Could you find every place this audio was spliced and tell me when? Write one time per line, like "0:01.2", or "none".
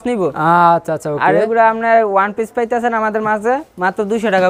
none

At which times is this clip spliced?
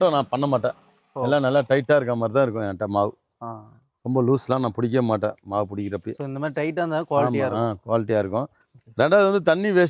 none

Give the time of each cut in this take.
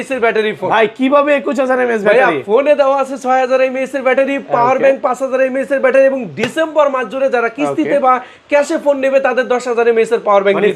none

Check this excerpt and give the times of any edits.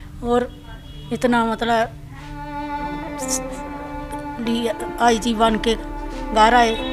none

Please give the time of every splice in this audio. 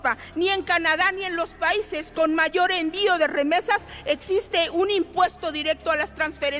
none

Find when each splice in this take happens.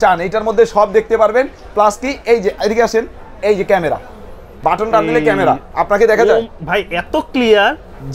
none

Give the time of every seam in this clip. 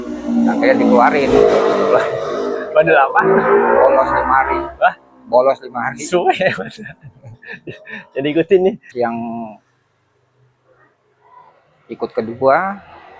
0:08.9

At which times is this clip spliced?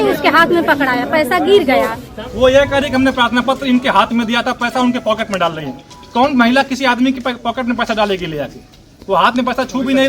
0:02.0

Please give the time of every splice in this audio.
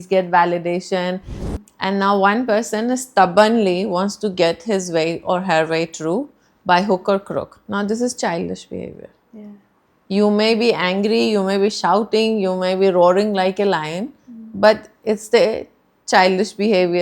0:01.3

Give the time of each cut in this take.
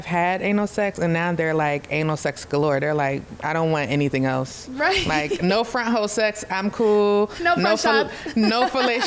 none

